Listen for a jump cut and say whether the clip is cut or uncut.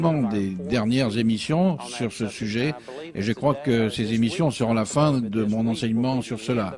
uncut